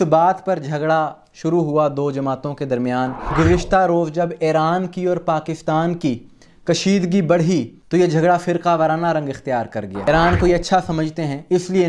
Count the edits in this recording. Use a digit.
2